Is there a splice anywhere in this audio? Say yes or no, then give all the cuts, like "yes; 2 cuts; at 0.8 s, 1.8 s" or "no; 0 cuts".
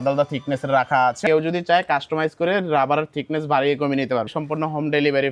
yes; 2 cuts; at 1.2 s, 4.3 s